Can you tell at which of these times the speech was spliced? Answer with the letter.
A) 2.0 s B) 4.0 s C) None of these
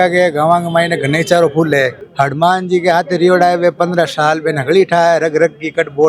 A